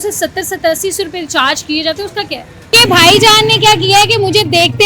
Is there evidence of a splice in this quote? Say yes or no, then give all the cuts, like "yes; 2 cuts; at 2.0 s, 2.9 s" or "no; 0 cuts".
yes; 1 cut; at 2.7 s